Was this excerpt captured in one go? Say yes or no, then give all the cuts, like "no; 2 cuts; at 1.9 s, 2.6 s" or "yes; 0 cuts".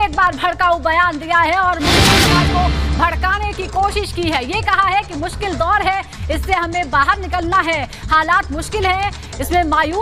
yes; 0 cuts